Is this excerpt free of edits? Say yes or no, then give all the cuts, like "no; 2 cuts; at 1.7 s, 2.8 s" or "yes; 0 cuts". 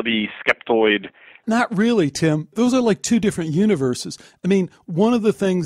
no; 2 cuts; at 1.4 s, 2.5 s